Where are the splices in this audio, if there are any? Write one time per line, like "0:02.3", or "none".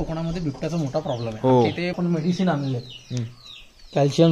0:01.9